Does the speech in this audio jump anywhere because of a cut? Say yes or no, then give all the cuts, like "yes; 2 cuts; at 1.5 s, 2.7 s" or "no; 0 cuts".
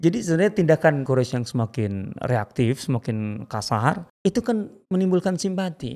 yes; 2 cuts; at 1.0 s, 4.1 s